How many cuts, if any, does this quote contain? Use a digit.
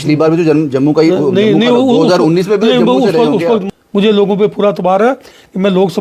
1